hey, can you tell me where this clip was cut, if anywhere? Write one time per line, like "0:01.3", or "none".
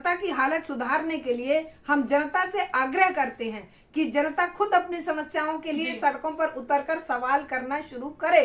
none